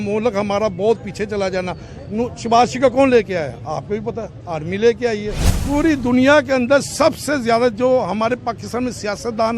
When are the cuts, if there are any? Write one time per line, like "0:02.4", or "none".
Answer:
0:05.5